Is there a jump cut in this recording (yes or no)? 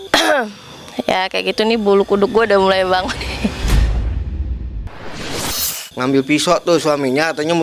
yes